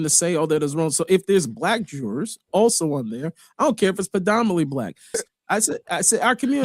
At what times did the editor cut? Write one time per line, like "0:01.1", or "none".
0:05.2